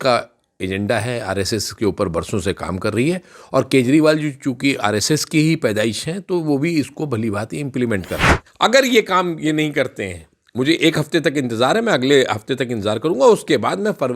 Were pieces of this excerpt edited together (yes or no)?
yes